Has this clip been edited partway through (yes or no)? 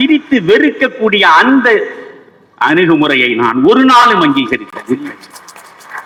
no